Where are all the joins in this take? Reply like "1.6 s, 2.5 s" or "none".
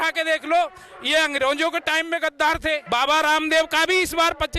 2.8 s